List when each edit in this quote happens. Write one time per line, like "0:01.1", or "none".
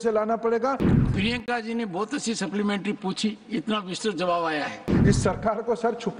0:00.9
0:04.9